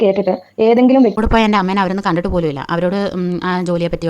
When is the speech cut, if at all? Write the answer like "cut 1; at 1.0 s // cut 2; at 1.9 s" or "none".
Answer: cut 1; at 1.1 s